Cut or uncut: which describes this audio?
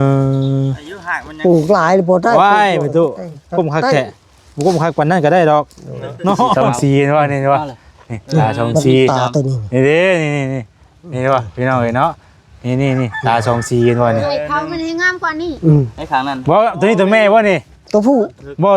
cut